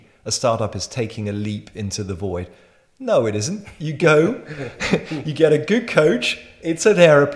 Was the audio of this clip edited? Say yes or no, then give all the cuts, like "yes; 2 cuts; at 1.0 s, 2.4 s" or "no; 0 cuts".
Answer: no; 0 cuts